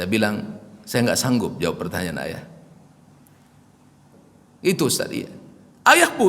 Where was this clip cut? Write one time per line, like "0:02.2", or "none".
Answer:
0:04.0